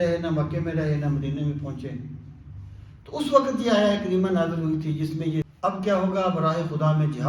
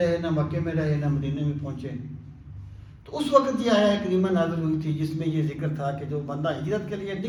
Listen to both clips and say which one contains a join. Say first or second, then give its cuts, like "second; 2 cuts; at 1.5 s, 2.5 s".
first; 1 cut; at 5.5 s